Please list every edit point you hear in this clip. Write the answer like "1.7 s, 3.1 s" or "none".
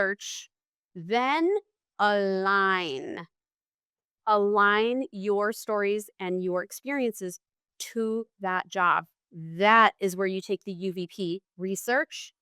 11.5 s